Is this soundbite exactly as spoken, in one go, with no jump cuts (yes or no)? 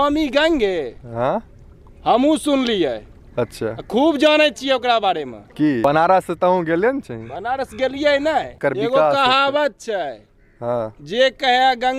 no